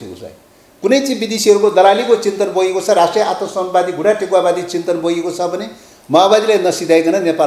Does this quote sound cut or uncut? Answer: uncut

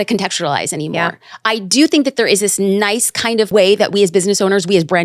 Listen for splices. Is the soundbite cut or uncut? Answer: cut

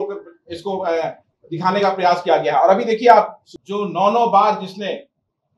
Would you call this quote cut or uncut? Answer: cut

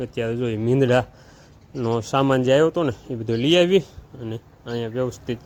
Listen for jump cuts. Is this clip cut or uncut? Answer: uncut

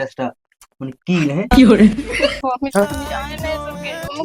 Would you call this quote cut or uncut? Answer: cut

